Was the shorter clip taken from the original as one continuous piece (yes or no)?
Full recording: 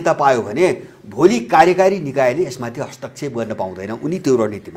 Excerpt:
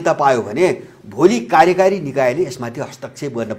yes